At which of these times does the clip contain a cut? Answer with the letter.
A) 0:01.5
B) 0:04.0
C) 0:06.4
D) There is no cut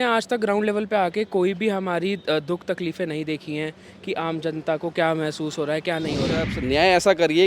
C